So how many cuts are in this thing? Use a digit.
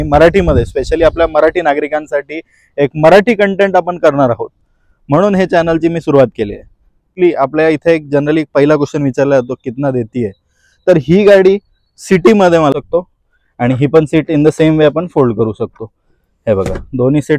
2